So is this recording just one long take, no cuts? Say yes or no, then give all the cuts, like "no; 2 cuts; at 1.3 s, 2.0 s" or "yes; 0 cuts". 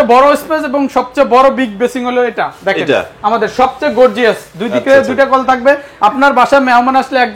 yes; 0 cuts